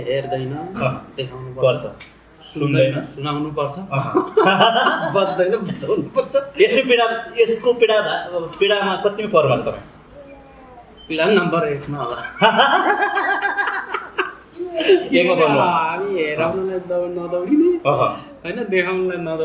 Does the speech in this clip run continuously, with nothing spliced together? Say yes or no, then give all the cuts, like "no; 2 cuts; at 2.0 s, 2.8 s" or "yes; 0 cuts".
yes; 0 cuts